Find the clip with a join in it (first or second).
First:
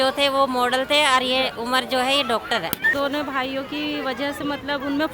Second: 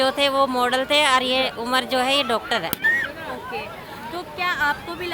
first